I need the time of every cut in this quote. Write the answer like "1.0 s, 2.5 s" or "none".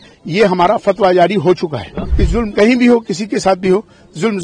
2.0 s